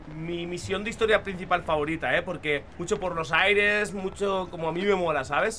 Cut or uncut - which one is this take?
cut